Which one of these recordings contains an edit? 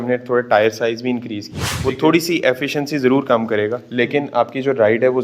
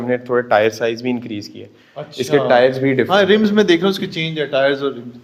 first; 1 cut; at 1.8 s

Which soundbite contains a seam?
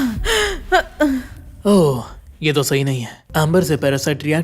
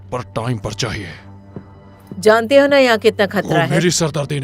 first; 1 cut; at 3.1 s

